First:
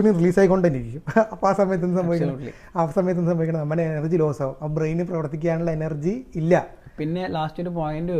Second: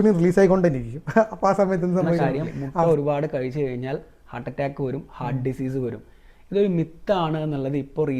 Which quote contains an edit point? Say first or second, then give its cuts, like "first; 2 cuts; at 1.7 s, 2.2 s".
second; 1 cut; at 2.9 s